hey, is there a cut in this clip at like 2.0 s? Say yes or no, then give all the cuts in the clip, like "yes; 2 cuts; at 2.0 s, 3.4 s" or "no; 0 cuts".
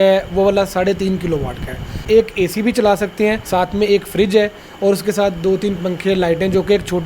yes; 2 cuts; at 2.0 s, 3.4 s